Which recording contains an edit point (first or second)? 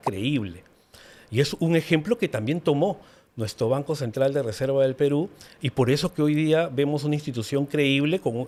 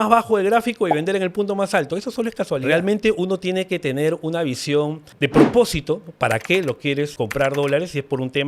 second